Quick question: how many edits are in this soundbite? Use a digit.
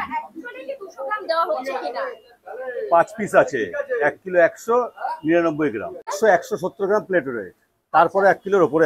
0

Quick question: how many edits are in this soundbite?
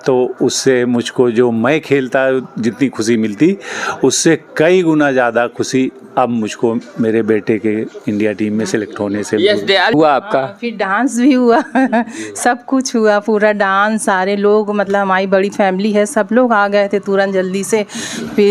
1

